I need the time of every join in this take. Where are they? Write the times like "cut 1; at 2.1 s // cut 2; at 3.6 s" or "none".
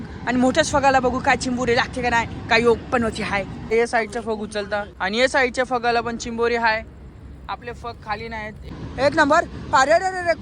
cut 1; at 3.7 s // cut 2; at 4.9 s // cut 3; at 8.8 s